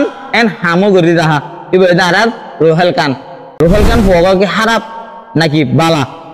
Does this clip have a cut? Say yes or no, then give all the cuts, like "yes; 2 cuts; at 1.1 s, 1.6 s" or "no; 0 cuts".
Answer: yes; 1 cut; at 3.4 s